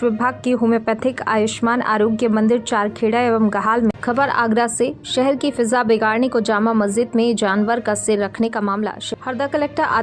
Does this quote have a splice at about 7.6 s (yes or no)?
no